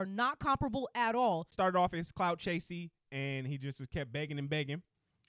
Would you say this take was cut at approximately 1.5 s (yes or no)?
yes